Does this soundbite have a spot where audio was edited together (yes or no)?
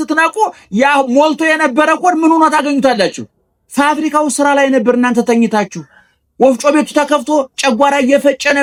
no